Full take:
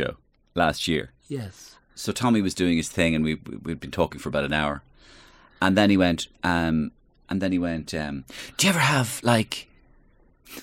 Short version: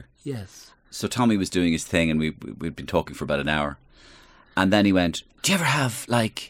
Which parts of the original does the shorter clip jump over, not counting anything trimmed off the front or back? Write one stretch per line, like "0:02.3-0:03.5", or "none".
0:06.3-0:08.4